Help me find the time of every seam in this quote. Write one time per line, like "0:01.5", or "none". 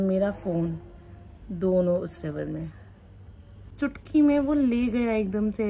0:03.7